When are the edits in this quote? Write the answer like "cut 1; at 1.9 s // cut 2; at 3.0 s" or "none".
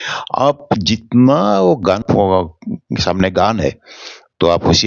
cut 1; at 2.0 s